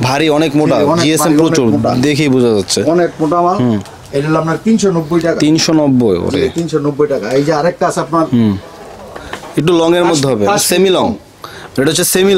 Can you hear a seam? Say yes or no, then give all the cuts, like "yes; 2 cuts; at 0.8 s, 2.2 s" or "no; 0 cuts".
no; 0 cuts